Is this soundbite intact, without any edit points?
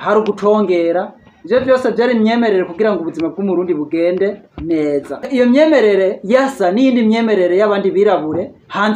no; 1 cut; at 5.3 s

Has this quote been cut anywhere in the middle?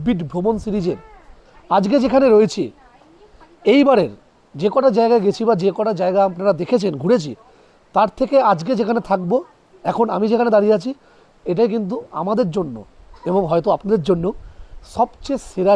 no; 0 cuts

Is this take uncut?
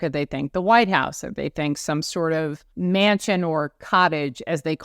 no; 1 cut; at 2.6 s

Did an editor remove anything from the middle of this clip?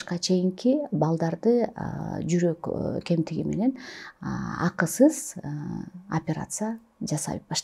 no; 0 cuts

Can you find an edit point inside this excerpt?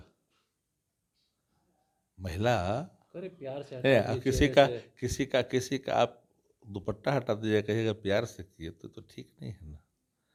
no; 0 cuts

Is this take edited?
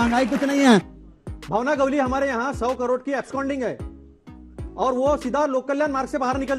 yes; 1 cut; at 1.0 s

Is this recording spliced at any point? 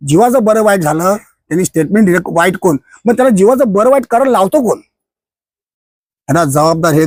no; 0 cuts

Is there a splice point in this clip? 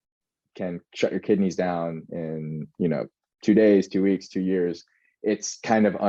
no; 0 cuts

